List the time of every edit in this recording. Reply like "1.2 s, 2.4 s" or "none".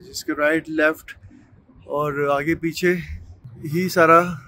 none